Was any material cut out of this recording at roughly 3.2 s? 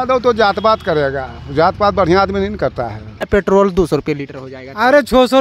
yes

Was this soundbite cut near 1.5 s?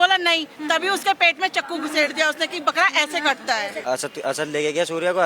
no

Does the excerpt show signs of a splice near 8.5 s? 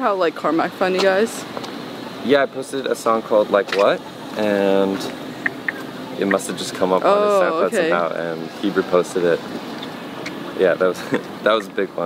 no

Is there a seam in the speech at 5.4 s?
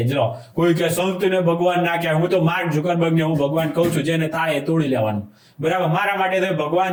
no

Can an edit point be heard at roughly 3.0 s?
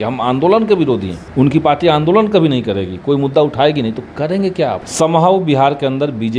no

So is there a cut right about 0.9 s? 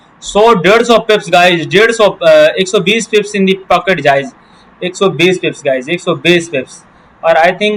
no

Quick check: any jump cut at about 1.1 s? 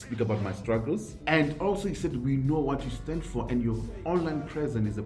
yes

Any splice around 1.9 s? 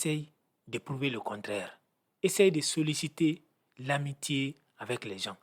no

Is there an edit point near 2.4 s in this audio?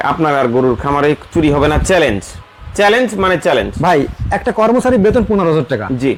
no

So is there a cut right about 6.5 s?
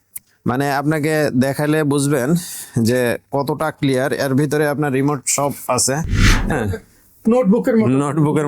yes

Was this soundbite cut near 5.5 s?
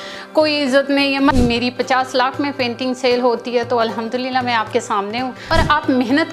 yes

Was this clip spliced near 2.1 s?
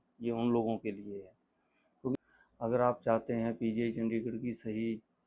yes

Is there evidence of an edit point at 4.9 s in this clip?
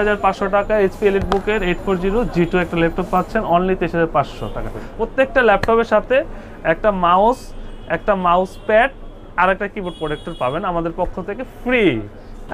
no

